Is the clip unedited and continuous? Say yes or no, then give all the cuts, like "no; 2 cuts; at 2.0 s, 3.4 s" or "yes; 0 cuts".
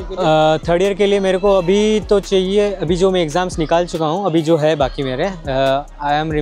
yes; 0 cuts